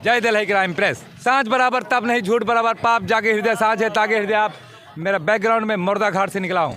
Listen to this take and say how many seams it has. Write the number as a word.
two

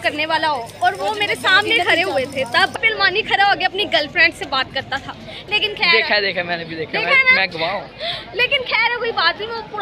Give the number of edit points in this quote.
one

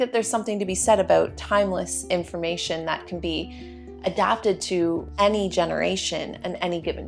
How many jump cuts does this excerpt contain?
zero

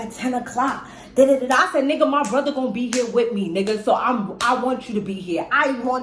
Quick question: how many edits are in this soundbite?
zero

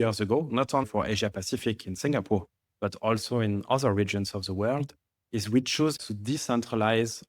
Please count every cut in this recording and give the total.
two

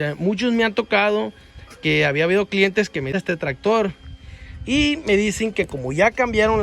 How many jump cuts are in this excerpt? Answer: one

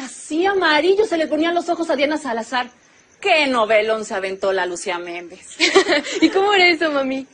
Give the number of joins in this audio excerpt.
one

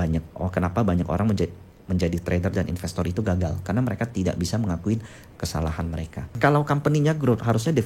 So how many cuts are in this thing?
one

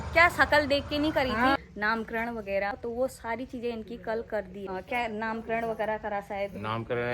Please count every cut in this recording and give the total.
three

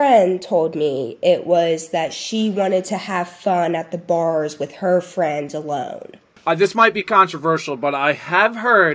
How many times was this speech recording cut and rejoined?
one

